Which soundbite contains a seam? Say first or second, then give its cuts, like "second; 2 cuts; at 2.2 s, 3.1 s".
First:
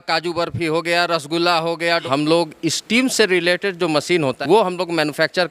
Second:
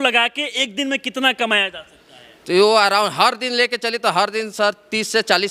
first; 2 cuts; at 2.0 s, 4.4 s